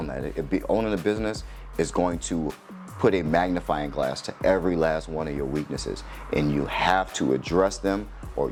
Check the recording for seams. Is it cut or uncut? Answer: uncut